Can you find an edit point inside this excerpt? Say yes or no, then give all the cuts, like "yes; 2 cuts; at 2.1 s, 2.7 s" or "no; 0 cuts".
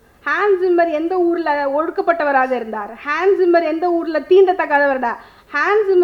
no; 0 cuts